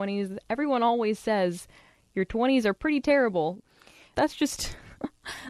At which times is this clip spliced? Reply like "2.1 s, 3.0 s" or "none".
3.8 s